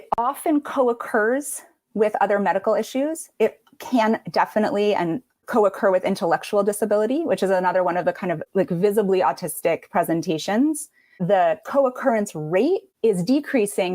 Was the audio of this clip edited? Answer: yes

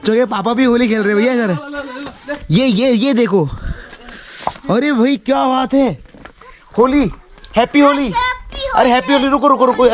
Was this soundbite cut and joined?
no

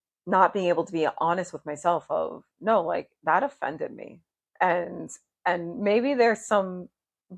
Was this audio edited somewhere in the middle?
no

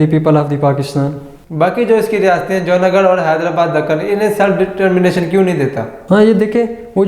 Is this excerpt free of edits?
no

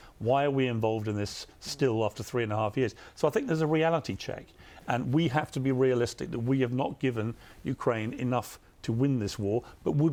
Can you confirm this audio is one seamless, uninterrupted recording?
yes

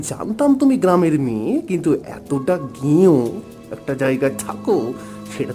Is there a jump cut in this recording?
no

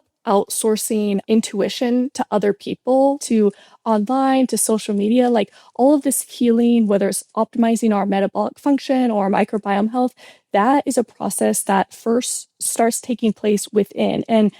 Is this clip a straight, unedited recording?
no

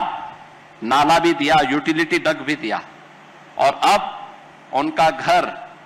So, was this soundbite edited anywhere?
no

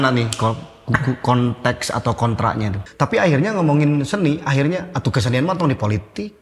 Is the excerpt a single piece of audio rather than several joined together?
no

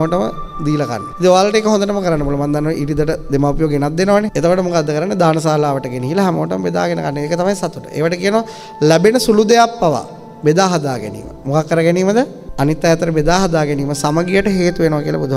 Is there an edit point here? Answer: no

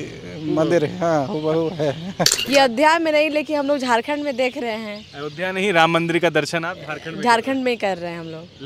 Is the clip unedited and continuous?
no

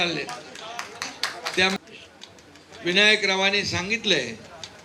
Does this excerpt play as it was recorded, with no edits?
no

